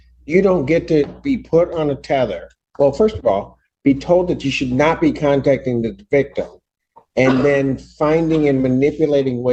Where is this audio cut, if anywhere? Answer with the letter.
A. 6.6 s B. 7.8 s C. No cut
C